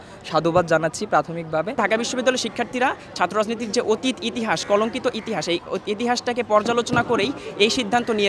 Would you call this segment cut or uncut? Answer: cut